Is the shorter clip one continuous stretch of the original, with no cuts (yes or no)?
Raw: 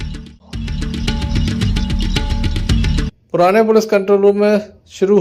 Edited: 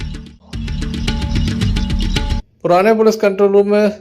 no